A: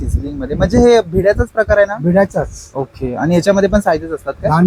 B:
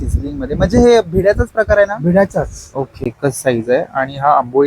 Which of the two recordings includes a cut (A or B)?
B